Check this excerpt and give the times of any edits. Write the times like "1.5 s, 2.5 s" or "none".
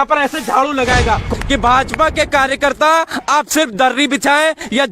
1.2 s